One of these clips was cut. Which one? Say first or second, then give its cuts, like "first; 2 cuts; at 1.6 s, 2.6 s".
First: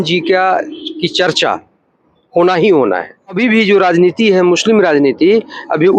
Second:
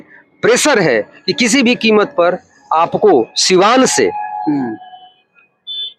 first; 1 cut; at 3.4 s